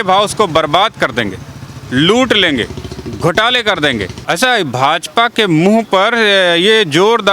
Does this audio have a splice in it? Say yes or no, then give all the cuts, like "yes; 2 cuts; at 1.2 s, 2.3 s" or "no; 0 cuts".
yes; 1 cut; at 4.2 s